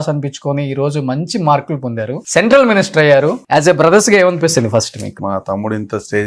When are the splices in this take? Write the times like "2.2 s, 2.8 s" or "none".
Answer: 2.2 s, 3.4 s, 5.2 s